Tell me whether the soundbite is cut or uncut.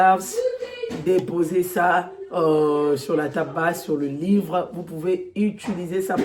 uncut